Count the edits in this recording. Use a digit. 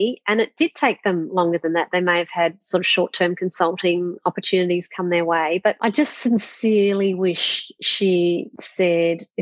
0